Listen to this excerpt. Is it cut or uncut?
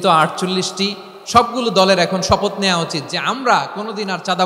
uncut